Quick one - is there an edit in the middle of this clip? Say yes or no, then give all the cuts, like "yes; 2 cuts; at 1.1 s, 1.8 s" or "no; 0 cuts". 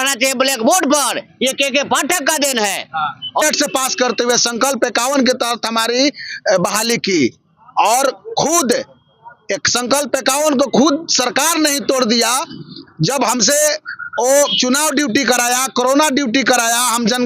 yes; 1 cut; at 3.4 s